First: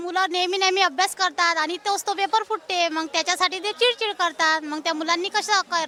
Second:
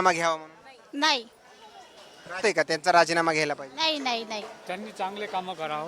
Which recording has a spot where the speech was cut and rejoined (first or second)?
second